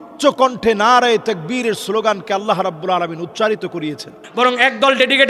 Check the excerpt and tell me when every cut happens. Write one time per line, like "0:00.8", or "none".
0:04.2